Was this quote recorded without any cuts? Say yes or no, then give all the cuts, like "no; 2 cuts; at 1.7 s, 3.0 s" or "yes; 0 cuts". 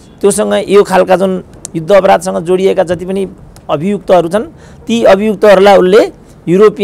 yes; 0 cuts